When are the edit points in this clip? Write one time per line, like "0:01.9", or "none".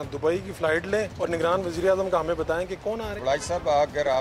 0:01.1
0:03.2

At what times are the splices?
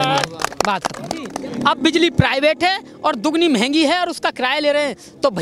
0:01.4

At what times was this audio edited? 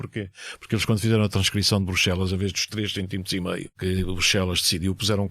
0:03.7

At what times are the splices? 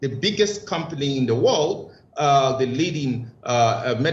none

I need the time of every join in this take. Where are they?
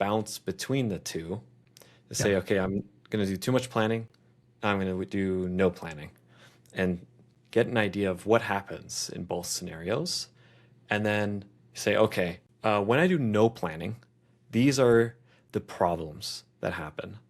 none

